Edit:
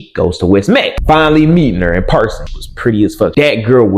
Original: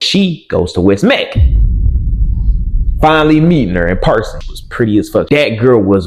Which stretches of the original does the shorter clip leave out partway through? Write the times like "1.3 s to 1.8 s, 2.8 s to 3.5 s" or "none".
1.3 s to 2.9 s